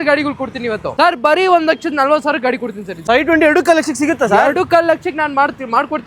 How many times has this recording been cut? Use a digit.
2